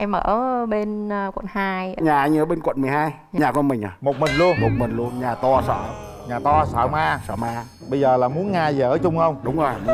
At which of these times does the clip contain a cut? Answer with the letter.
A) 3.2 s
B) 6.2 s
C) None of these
A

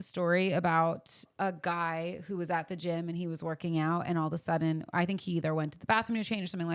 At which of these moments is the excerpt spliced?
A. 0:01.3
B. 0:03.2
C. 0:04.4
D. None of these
A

